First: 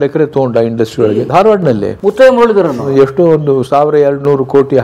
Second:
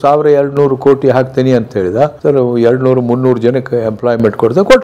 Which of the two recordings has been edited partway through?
first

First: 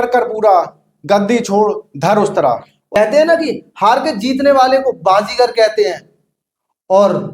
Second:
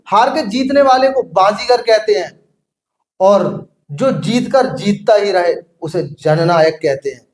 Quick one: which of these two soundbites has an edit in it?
first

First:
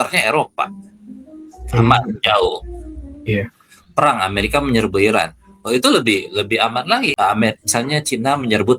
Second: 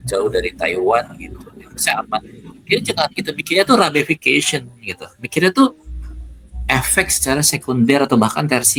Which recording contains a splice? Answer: first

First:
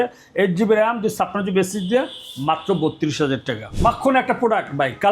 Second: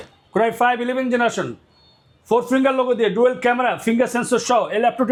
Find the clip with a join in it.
first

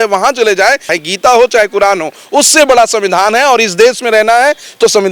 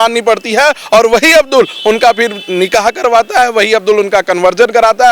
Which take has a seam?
first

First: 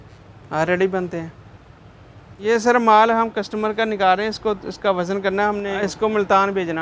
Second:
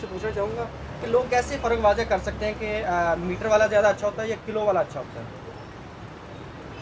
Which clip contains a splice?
first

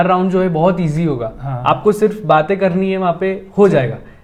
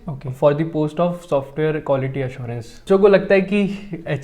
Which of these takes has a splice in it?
second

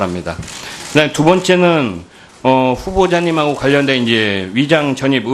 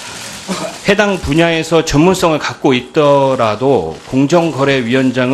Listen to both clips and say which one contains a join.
first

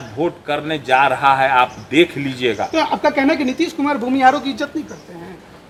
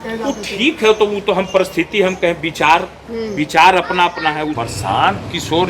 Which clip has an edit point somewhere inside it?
second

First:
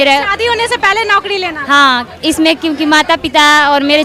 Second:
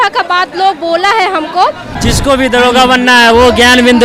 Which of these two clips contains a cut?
second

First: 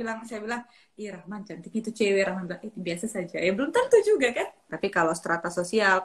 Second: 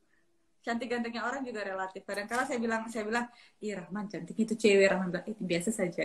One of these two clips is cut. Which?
first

